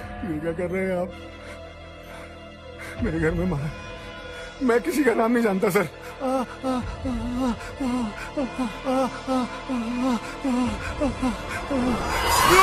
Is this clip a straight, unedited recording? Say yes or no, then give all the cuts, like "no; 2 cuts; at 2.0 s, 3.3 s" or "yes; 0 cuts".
yes; 0 cuts